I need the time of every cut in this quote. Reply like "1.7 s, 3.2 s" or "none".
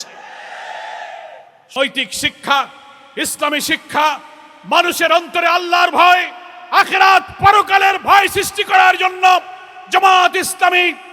1.8 s